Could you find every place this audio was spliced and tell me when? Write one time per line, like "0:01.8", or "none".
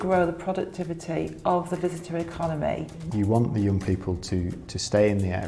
0:03.0